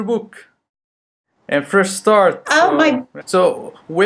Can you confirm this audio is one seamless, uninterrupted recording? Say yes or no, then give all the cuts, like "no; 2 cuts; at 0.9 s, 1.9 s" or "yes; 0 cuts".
yes; 0 cuts